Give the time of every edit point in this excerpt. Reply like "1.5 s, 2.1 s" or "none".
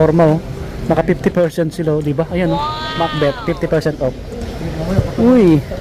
none